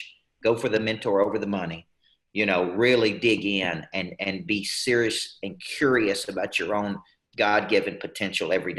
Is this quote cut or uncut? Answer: uncut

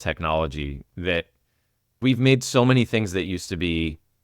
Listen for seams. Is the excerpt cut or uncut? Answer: cut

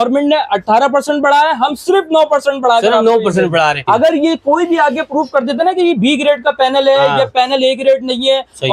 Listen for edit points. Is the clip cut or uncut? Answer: cut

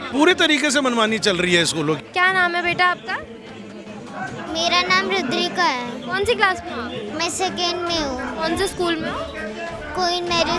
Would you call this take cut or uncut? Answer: cut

